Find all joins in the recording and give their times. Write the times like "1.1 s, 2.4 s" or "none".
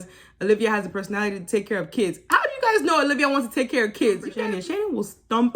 4.3 s